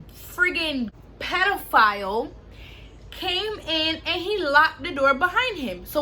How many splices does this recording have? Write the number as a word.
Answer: one